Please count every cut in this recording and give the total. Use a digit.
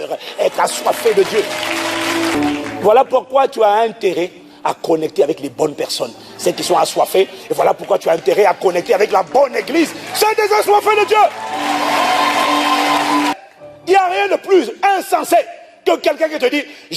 2